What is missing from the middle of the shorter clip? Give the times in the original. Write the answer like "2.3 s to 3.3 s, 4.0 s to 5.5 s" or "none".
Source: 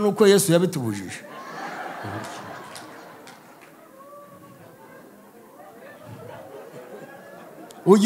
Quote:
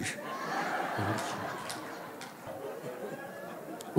3.5 s to 6.4 s